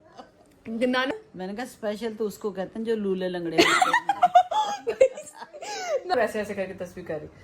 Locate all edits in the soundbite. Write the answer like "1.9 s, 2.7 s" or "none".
1.1 s, 6.1 s